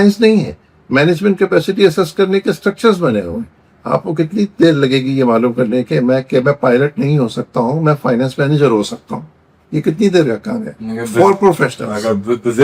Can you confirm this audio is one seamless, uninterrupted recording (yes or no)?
yes